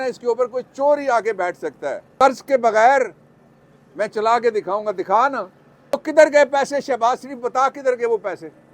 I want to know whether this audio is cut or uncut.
cut